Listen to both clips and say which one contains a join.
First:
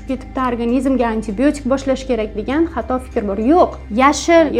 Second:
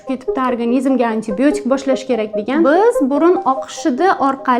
second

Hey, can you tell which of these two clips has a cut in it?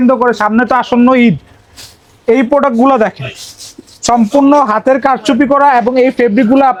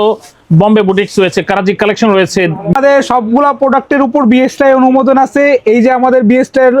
second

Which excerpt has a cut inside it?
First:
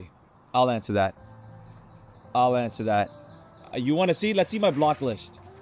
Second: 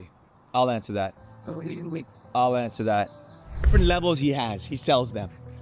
second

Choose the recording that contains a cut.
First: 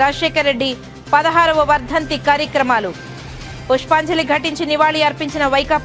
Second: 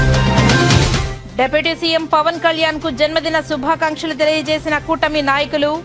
second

